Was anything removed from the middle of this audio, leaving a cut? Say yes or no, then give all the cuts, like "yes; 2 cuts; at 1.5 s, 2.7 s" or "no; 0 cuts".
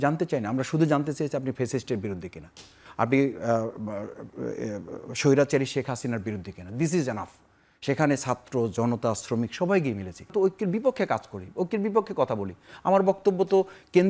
yes; 1 cut; at 10.3 s